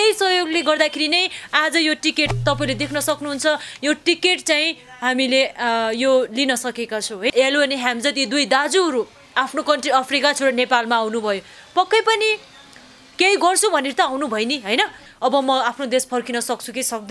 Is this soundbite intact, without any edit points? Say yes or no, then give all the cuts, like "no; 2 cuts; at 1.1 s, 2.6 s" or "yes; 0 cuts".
no; 2 cuts; at 7.3 s, 15.0 s